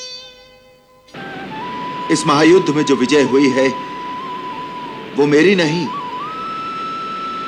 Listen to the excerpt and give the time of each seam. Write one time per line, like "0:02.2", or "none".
0:01.1

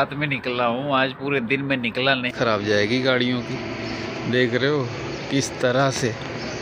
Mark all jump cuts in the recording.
0:02.3

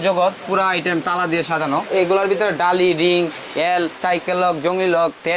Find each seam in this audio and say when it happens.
0:01.9

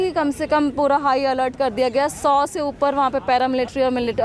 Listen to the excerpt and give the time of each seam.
none

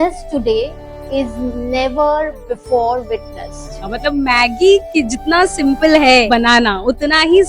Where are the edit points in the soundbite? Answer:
0:03.9

